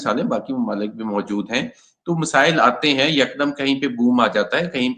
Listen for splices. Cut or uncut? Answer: uncut